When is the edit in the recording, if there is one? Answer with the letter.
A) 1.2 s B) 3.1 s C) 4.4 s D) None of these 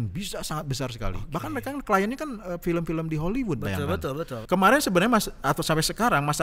C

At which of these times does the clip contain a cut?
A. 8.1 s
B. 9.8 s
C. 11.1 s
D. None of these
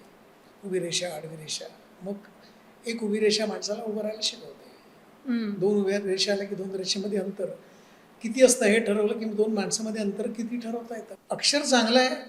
C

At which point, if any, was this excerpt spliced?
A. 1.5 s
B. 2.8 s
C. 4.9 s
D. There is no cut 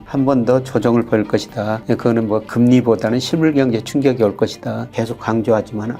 C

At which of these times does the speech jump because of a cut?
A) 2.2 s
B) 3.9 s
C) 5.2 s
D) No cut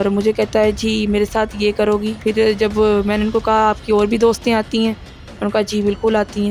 A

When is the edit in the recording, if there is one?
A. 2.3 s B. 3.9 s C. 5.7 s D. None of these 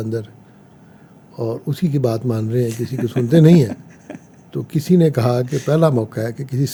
D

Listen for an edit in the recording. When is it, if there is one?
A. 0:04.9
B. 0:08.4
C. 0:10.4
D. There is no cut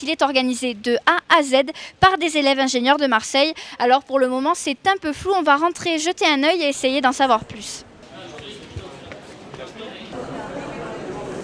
B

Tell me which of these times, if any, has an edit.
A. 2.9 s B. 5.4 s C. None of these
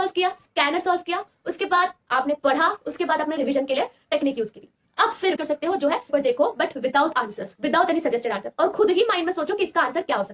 B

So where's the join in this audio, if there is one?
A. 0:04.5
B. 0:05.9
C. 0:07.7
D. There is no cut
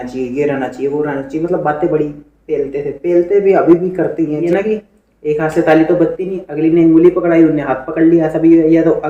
A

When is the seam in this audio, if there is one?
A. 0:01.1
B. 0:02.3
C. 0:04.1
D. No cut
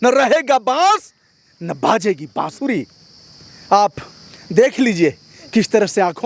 D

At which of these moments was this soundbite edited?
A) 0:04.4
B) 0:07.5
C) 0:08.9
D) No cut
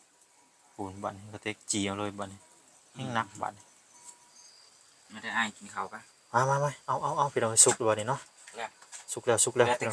A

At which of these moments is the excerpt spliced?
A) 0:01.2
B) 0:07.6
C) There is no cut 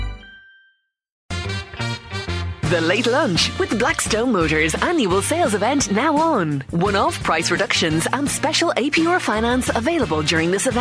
A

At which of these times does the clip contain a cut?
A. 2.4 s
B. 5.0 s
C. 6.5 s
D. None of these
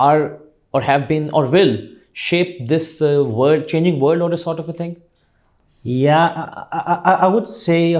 D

